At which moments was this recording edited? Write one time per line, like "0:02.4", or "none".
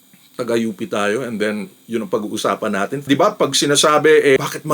0:03.0